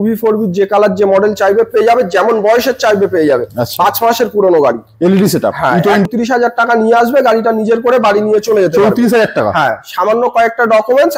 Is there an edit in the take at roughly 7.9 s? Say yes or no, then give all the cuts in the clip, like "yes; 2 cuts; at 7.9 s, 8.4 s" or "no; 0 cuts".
no; 1 cut; at 6.1 s